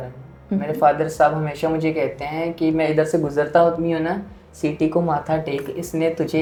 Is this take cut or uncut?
uncut